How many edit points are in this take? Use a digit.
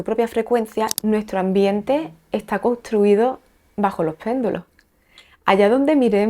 1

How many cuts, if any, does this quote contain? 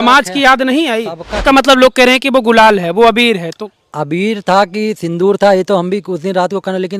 1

